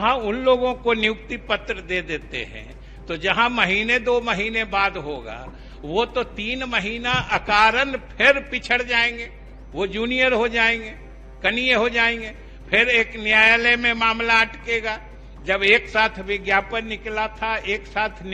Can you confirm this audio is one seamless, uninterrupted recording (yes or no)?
yes